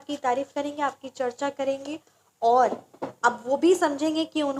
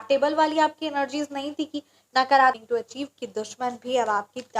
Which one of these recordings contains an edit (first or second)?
second